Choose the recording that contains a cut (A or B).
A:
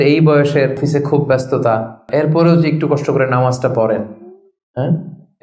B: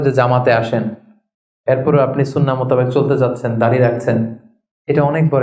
A